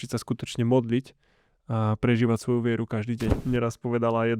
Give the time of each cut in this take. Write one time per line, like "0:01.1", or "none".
0:03.4